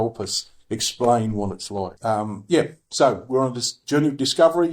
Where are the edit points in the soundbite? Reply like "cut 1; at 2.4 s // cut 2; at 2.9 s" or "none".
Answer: cut 1; at 1.9 s